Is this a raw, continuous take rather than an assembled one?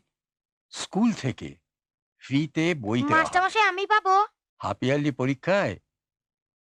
no; 1 cut; at 4.5 s

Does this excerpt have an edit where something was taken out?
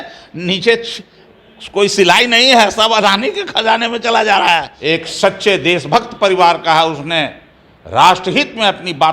yes; 1 cut; at 4.7 s

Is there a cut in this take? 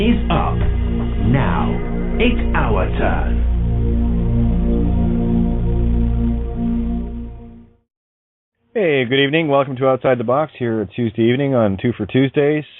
yes; 1 cut; at 5.5 s

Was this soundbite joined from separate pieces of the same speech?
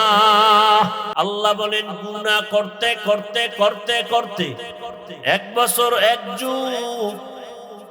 yes; 1 cut; at 1.1 s

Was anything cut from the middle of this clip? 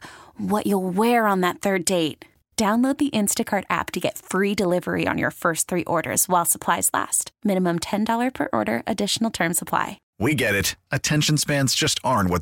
yes; 1 cut; at 10.0 s

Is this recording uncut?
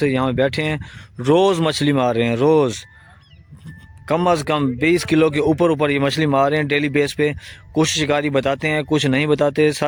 yes; 0 cuts

